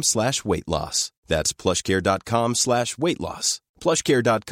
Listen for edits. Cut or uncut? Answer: uncut